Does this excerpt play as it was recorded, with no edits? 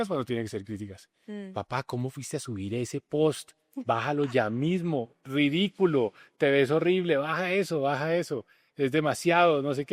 yes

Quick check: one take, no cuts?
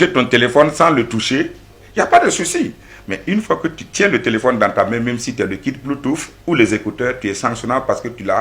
yes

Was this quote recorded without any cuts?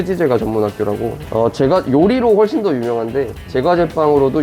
no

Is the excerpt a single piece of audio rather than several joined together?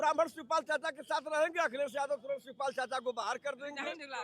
yes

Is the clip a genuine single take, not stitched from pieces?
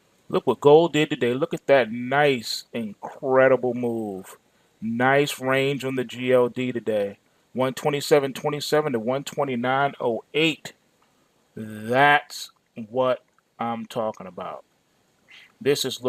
yes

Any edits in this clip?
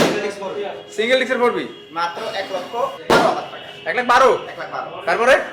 no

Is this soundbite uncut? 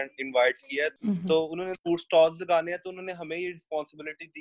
no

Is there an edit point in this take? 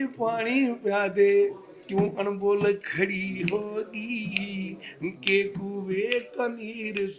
no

